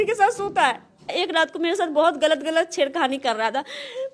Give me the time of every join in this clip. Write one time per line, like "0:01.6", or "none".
0:01.2